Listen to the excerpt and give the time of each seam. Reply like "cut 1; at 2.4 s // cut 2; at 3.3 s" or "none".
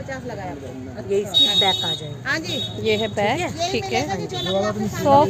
none